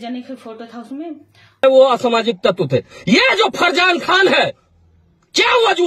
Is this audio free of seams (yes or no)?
no